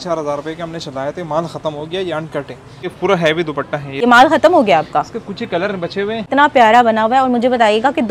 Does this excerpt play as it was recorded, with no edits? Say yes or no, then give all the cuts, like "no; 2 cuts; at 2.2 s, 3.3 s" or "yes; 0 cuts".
no; 3 cuts; at 2.9 s, 4.0 s, 6.3 s